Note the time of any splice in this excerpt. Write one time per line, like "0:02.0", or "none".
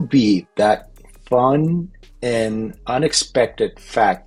none